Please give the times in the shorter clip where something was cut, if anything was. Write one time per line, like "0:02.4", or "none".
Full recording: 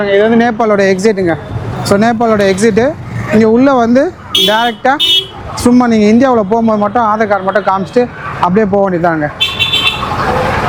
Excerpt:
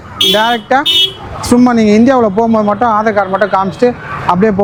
none